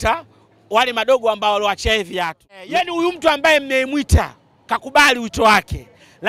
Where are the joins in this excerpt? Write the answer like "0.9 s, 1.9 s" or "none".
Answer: 2.5 s